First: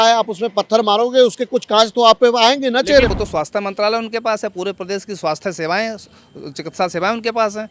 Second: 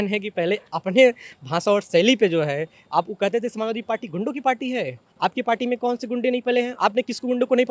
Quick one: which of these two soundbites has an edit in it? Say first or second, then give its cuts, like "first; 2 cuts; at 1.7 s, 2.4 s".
first; 1 cut; at 3.2 s